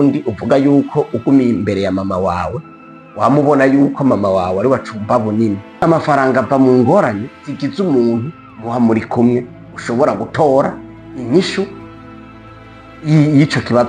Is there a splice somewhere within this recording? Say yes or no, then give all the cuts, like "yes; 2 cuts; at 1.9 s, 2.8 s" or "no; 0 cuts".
yes; 1 cut; at 5.8 s